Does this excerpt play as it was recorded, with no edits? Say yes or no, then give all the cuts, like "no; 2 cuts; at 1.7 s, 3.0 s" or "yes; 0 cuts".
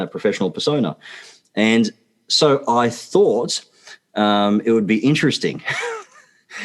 yes; 0 cuts